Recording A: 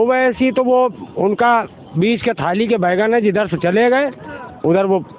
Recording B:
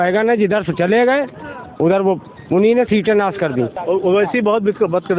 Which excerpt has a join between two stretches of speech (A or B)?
B